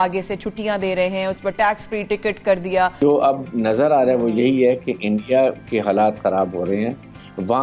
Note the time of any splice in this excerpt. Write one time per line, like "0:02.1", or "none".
0:03.0